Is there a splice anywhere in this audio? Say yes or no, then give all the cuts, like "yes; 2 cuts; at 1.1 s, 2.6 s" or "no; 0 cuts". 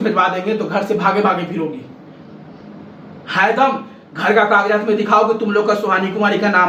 no; 0 cuts